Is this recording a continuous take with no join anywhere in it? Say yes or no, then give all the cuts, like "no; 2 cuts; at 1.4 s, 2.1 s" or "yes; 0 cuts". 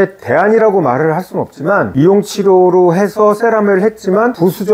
yes; 0 cuts